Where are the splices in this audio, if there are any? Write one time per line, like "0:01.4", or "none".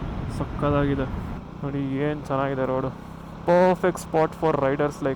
0:01.3